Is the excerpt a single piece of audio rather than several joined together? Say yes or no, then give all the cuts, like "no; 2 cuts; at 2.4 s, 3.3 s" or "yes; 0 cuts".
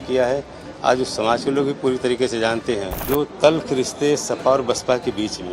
no; 1 cut; at 3.0 s